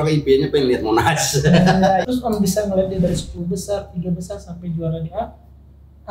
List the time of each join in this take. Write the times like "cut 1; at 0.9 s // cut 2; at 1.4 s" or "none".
cut 1; at 2.0 s